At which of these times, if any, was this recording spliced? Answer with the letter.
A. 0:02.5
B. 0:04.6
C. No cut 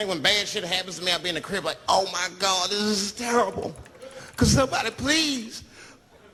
C